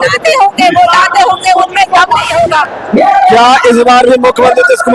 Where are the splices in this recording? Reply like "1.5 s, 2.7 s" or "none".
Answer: 2.7 s